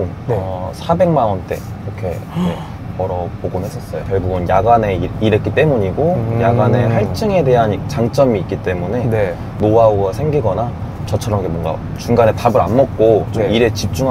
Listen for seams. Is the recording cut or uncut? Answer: uncut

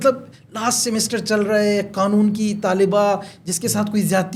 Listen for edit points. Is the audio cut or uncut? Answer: uncut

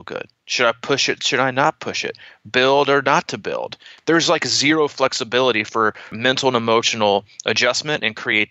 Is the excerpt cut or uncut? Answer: cut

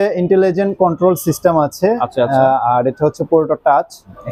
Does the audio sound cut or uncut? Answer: uncut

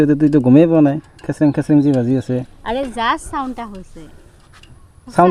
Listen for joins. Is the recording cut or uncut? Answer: uncut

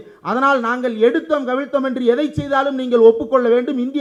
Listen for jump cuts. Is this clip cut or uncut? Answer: uncut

